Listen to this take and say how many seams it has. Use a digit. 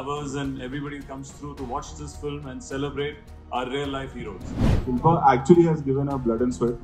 1